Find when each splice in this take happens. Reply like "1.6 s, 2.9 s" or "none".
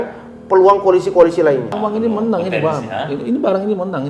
1.7 s

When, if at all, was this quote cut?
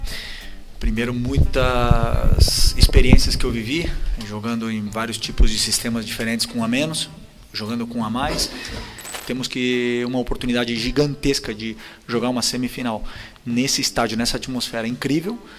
9.1 s

